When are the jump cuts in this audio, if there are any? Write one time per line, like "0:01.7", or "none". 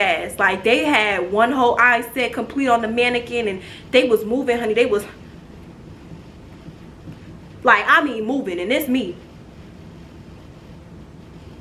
none